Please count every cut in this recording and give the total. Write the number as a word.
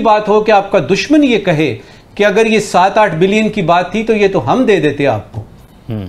zero